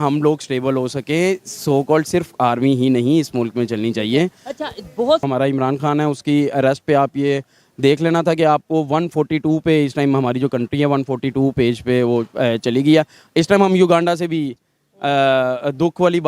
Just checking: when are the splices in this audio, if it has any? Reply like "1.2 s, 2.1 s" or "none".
5.2 s